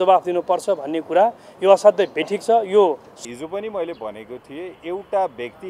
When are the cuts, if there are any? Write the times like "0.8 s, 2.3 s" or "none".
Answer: 3.1 s

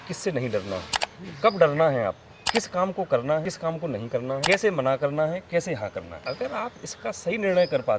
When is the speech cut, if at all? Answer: 2.3 s, 4.0 s, 6.1 s

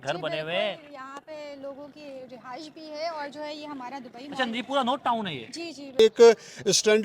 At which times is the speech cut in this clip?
6.0 s

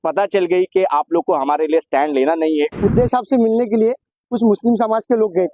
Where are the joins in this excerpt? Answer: 2.7 s

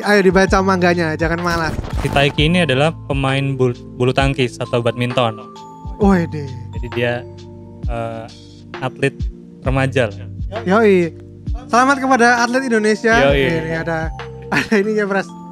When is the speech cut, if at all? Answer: 1.9 s

